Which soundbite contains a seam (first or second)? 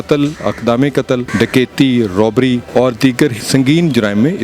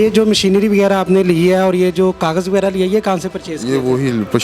first